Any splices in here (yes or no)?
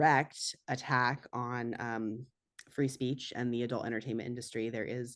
no